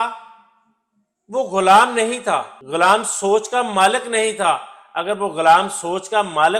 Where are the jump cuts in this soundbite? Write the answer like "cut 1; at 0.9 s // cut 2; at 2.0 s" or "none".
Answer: cut 1; at 2.6 s